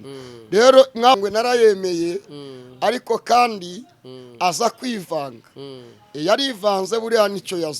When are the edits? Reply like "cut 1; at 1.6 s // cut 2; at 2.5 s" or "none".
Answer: cut 1; at 1.2 s

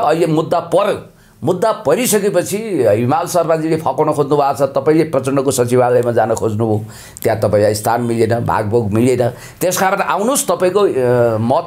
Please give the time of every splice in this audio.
none

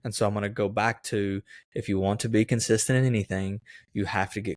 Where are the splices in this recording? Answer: none

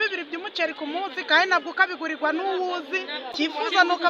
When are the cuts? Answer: cut 1; at 3.2 s

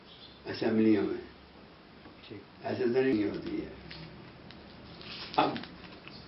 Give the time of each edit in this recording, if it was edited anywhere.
cut 1; at 3.1 s

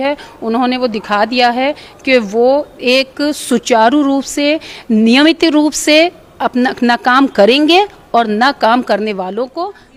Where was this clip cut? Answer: none

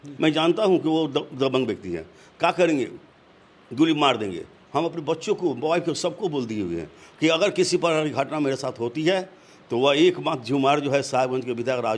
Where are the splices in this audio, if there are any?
none

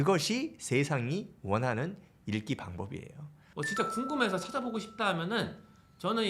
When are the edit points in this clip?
cut 1; at 3.4 s

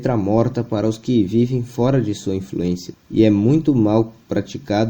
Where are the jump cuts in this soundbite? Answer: cut 1; at 2.9 s

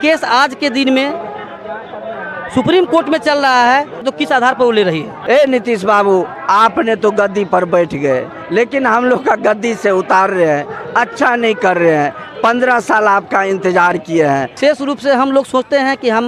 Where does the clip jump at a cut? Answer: cut 1; at 4.1 s // cut 2; at 5.1 s // cut 3; at 14.5 s

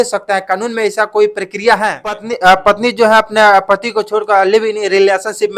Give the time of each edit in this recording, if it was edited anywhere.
cut 1; at 2.3 s

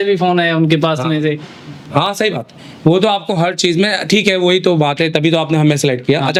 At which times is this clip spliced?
none

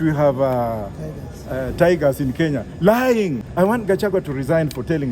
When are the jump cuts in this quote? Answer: cut 1; at 3.4 s

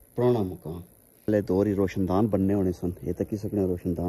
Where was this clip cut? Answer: cut 1; at 1.3 s

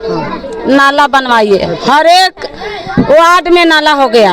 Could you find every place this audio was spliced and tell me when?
none

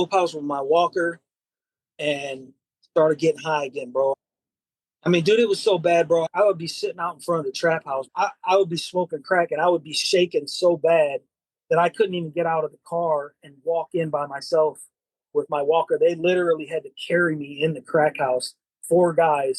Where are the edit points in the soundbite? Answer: cut 1; at 4.2 s // cut 2; at 6.2 s // cut 3; at 8.1 s

